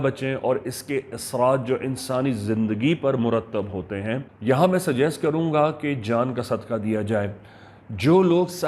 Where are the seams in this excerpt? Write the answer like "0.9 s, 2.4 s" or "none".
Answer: 4.3 s